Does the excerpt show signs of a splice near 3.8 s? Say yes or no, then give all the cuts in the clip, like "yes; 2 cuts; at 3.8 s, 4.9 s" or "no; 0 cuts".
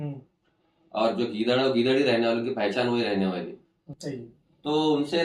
yes; 1 cut; at 3.8 s